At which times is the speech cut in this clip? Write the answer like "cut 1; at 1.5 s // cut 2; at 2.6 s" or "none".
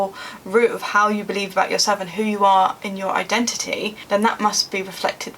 cut 1; at 2.1 s // cut 2; at 3.9 s